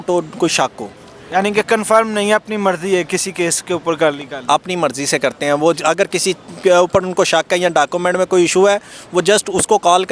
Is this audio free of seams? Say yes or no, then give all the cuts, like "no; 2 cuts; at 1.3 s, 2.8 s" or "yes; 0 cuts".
yes; 0 cuts